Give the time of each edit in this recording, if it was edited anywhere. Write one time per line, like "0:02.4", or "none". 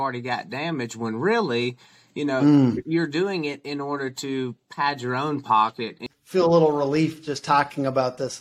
0:06.1